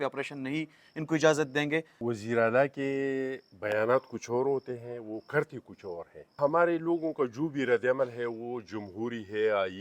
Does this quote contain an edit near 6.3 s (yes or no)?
yes